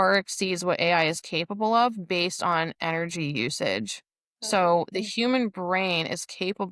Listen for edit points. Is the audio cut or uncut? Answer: uncut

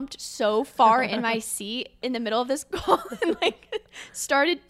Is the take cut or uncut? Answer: uncut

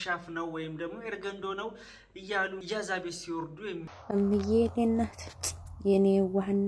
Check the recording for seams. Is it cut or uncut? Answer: cut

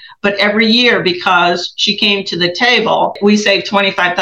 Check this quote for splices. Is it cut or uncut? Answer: cut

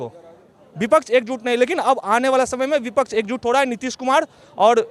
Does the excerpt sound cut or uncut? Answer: uncut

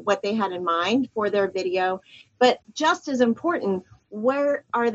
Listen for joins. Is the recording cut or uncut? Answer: cut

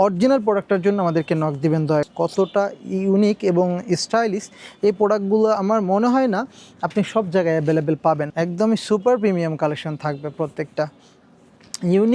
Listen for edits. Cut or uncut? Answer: cut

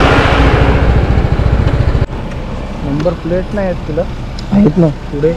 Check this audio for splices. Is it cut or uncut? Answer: cut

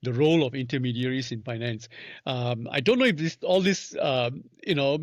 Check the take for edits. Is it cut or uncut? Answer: uncut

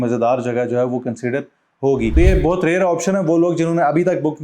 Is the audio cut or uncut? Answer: cut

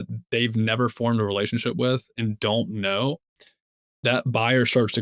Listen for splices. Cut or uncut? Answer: uncut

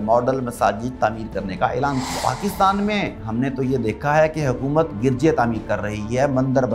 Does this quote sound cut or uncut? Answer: cut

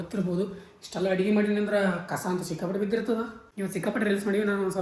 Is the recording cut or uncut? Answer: cut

